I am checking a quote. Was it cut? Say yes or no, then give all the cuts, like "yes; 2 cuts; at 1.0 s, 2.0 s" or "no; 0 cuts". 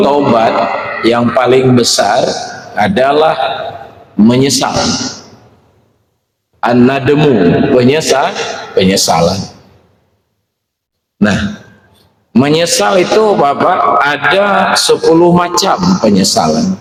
no; 0 cuts